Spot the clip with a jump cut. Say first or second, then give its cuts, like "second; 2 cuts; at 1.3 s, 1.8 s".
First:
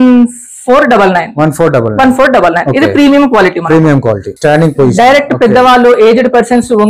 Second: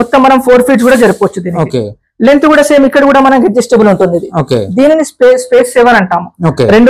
first; 1 cut; at 4.3 s